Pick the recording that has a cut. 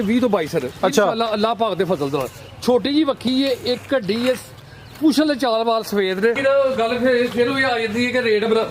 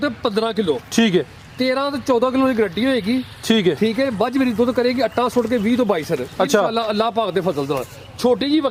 first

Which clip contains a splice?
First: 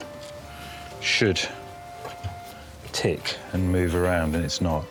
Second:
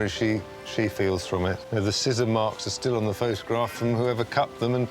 second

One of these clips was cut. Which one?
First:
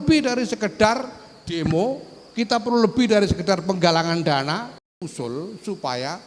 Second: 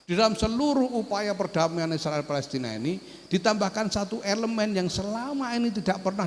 first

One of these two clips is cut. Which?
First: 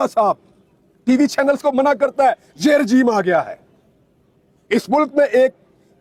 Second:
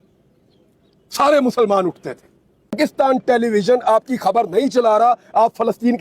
second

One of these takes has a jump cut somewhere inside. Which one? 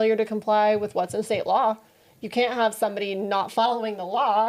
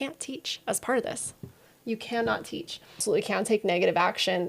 second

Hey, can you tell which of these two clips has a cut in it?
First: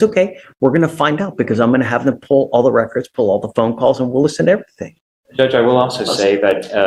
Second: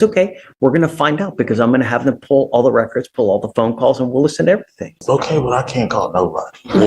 second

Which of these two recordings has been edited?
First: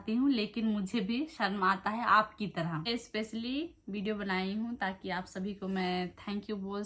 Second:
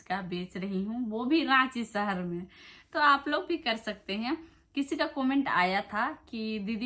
first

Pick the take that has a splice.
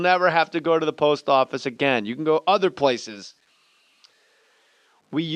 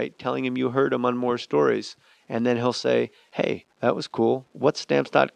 second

